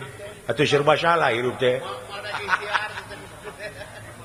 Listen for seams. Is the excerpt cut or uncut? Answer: uncut